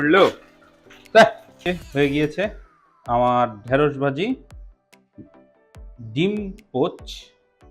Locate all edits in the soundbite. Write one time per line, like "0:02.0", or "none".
0:01.6